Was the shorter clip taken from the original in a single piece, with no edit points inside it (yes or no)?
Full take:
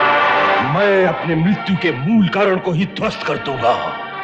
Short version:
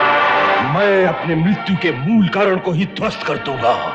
yes